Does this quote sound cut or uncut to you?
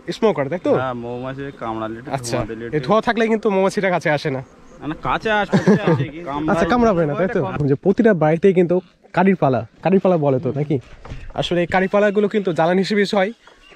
cut